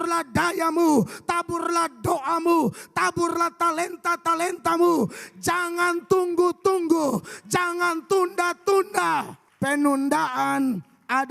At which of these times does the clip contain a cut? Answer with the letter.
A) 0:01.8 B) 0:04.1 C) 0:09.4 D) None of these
C